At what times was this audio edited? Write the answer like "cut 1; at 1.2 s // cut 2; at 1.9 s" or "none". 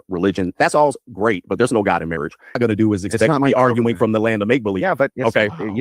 cut 1; at 2.6 s